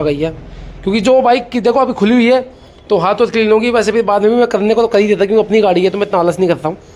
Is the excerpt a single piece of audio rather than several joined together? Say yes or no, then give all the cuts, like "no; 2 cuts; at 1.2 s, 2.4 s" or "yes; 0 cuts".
yes; 0 cuts